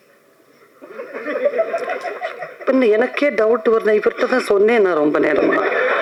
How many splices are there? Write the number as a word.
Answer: zero